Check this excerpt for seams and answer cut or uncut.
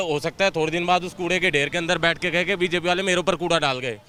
uncut